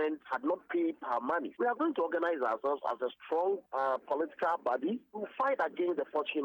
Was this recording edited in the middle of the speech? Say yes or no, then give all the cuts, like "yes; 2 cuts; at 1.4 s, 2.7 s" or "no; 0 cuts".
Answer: yes; 1 cut; at 1.5 s